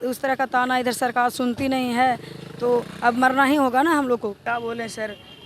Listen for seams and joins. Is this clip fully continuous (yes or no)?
no